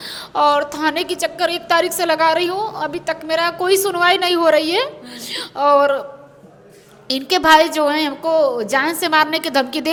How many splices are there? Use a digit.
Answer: 0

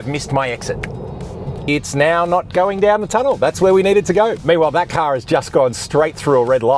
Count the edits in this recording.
2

